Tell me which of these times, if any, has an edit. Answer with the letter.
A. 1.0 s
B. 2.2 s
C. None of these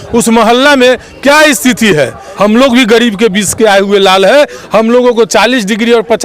B